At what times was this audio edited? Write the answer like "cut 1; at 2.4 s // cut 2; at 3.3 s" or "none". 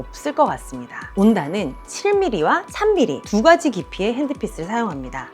cut 1; at 1.0 s